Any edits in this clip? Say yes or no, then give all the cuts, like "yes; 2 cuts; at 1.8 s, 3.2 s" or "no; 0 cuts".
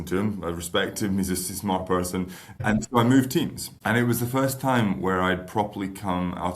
yes; 1 cut; at 3.7 s